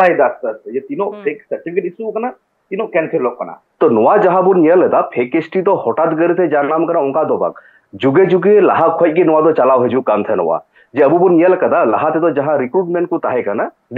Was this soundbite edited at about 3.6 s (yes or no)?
yes